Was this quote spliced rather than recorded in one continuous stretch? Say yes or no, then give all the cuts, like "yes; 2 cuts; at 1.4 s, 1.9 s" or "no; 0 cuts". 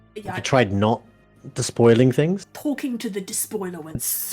yes; 1 cut; at 2.4 s